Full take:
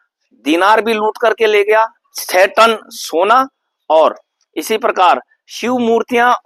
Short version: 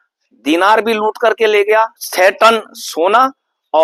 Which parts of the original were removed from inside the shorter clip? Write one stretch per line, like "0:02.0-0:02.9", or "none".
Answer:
0:02.0-0:02.2